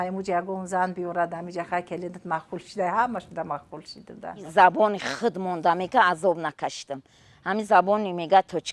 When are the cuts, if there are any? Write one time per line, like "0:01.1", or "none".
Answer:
none